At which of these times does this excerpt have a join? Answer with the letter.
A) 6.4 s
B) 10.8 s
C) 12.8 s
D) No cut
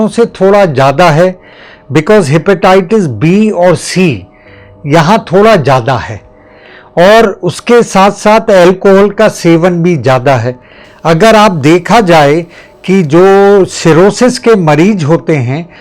D